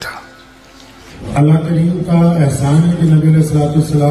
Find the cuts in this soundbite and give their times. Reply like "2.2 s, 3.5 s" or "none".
1.2 s